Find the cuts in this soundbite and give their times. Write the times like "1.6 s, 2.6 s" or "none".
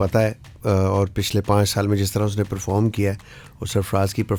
none

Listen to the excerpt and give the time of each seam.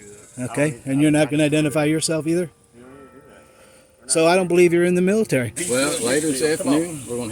5.6 s

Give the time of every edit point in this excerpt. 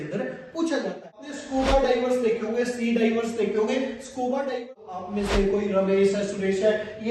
1.3 s, 4.8 s

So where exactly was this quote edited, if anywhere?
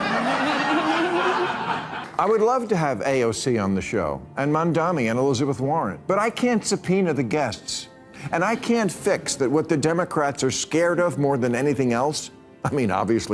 1.9 s

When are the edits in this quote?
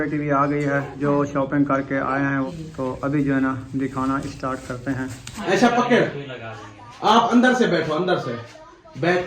0.9 s, 2.5 s, 5.4 s

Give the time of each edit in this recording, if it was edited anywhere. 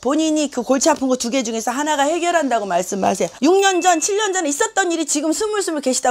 3.3 s

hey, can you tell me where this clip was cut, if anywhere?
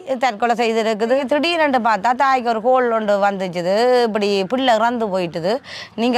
1.2 s

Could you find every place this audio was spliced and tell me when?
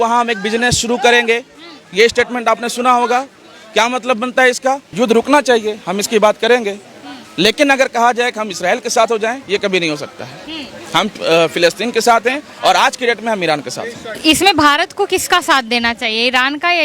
4.9 s, 14.0 s

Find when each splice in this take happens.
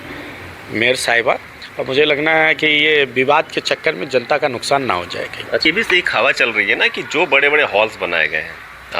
5.7 s

